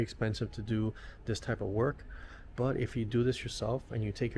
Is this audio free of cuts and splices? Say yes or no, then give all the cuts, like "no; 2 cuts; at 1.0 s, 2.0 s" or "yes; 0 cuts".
yes; 0 cuts